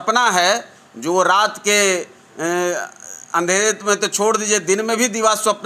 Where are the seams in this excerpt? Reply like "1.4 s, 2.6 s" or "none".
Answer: none